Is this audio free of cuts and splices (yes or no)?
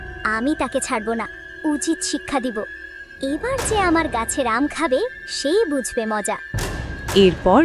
yes